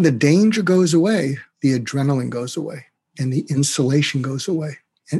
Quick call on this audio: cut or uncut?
cut